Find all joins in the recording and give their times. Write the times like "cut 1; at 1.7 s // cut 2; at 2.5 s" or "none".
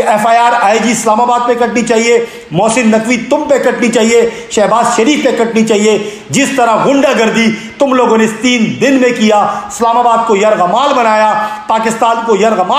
none